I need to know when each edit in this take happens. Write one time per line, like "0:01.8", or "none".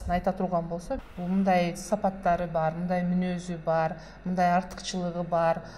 0:01.1